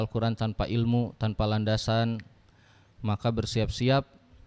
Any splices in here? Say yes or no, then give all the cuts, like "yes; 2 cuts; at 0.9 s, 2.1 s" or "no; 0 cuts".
no; 0 cuts